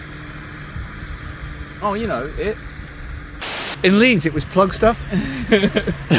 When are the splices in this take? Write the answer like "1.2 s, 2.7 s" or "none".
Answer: 3.6 s